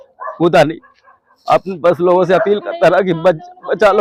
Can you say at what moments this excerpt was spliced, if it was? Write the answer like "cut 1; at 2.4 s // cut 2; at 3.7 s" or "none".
none